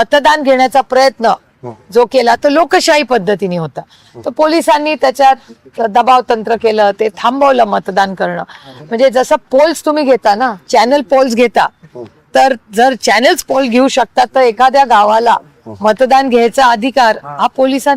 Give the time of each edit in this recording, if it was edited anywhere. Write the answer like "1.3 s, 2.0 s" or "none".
none